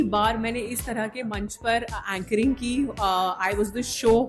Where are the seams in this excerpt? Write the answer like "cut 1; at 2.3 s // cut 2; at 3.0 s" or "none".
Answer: none